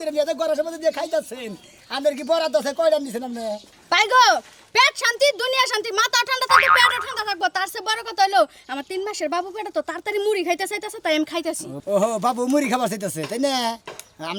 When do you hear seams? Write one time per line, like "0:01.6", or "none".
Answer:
none